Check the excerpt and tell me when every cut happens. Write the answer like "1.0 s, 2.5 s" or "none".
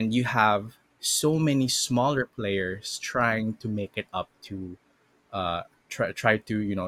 none